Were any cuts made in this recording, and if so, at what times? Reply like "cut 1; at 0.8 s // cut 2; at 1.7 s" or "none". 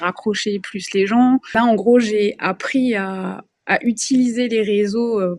cut 1; at 1.5 s